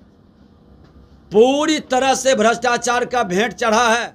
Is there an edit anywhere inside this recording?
no; 0 cuts

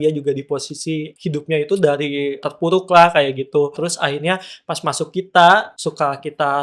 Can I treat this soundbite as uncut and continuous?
no; 4 cuts; at 1.1 s, 2.4 s, 3.8 s, 5.7 s

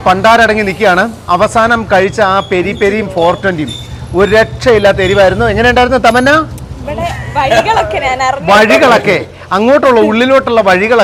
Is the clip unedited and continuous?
yes; 0 cuts

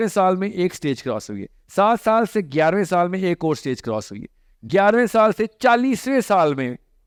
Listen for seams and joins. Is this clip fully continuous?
yes; 0 cuts

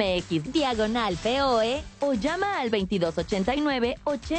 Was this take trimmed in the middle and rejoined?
yes; 1 cut; at 1.9 s

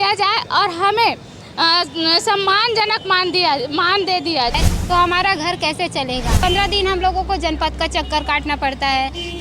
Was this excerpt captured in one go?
no; 2 cuts; at 4.6 s, 6.4 s

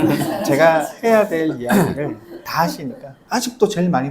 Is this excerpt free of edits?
no; 1 cut; at 3.1 s

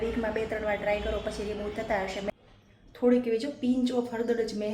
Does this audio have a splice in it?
yes; 1 cut; at 2.3 s

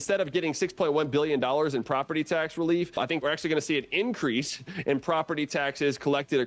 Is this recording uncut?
no; 1 cut; at 3.2 s

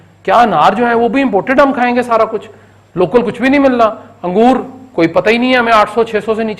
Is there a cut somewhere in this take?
no; 0 cuts

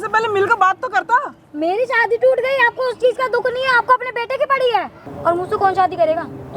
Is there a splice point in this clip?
yes; 1 cut; at 5.0 s

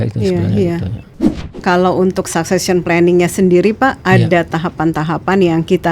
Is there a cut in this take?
yes; 1 cut; at 1.1 s

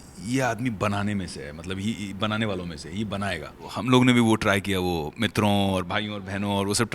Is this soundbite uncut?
no; 1 cut; at 3.7 s

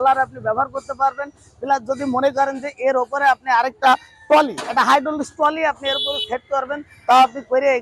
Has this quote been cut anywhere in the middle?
no; 0 cuts

